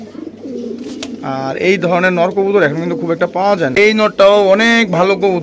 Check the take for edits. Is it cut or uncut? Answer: cut